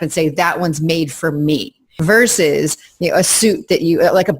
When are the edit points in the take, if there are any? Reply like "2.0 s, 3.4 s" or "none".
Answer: 2.0 s

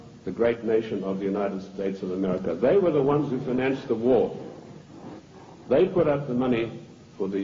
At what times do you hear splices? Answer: 1.5 s

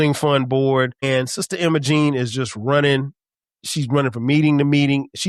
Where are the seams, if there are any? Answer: 1.0 s

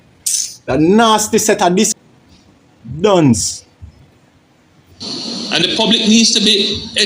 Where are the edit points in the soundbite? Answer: 1.9 s

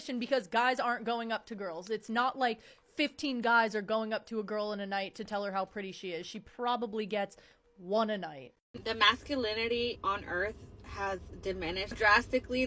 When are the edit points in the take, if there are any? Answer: 8.7 s

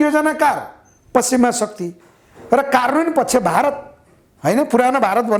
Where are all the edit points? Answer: none

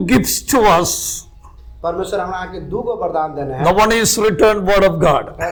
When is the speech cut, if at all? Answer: none

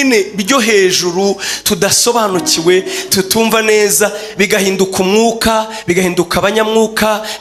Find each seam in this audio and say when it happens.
none

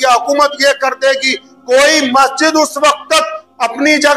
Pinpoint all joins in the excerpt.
none

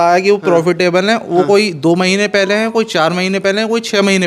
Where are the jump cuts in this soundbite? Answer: none

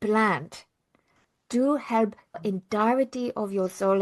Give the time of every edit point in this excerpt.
2.4 s

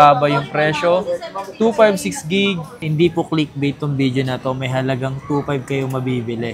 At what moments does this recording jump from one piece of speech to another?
2.8 s

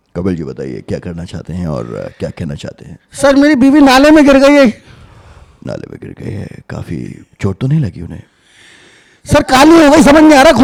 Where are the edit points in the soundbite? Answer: none

